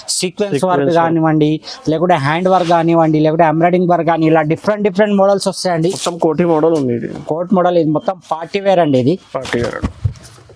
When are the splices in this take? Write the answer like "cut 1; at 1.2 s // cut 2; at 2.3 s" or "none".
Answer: cut 1; at 5.8 s

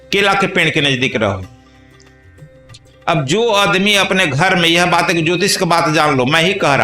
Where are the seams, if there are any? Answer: none

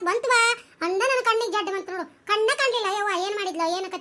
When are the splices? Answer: none

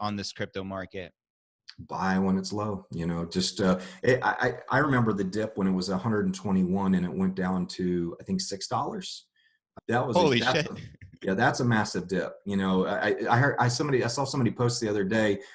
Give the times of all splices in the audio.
cut 1; at 9.7 s

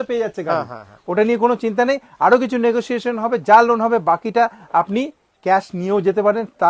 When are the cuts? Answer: none

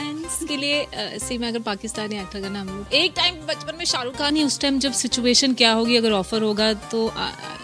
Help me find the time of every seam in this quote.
cut 1; at 2.8 s // cut 2; at 4.3 s

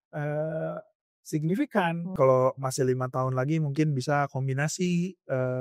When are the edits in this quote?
cut 1; at 2.1 s

